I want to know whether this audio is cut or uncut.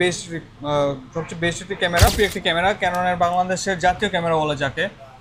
cut